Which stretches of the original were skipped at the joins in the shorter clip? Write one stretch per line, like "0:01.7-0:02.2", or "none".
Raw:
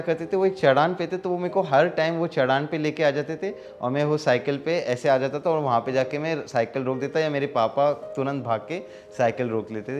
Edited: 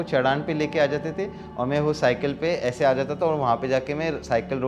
none